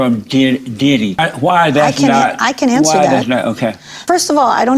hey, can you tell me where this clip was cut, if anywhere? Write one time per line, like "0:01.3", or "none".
0:01.2
0:04.0